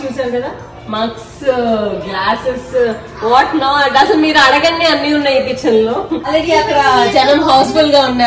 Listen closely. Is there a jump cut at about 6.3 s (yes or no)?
yes